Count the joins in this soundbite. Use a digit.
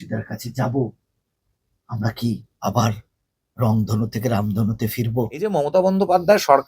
1